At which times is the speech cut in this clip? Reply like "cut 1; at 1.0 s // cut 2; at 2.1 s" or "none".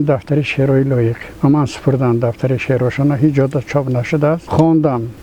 cut 1; at 1.3 s // cut 2; at 4.4 s